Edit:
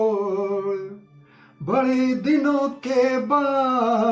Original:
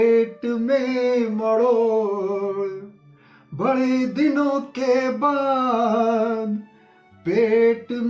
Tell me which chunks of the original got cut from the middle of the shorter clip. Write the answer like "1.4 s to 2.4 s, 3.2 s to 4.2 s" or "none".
none